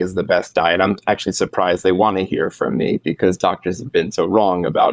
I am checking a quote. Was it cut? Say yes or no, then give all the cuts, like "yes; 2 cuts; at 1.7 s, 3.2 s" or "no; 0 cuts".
no; 0 cuts